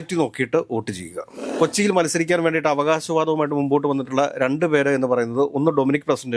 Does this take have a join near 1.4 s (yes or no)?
yes